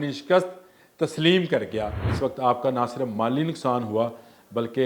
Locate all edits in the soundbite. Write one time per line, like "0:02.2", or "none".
0:02.0